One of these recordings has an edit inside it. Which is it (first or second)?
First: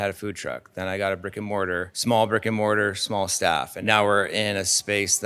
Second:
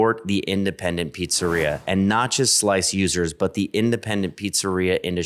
first